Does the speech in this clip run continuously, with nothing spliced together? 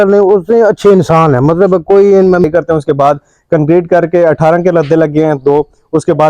no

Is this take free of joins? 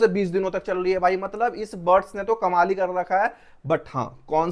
yes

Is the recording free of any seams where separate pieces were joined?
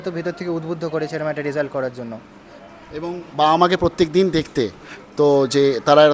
yes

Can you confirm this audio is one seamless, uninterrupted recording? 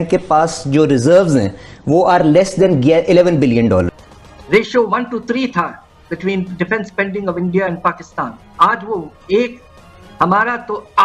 no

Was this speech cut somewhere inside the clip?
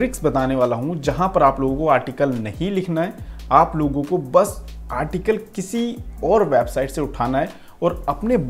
no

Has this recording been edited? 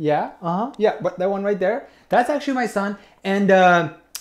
no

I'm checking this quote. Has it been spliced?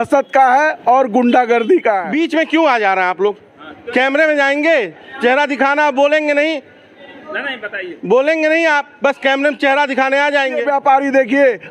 yes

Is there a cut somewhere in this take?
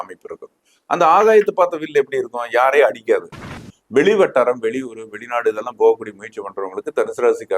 yes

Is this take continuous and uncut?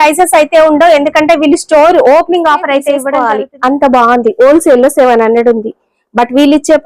no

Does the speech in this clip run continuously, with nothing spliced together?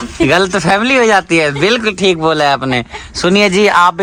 yes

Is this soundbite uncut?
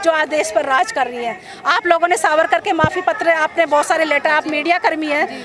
yes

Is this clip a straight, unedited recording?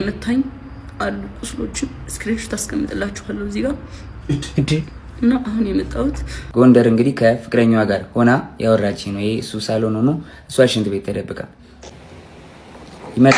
no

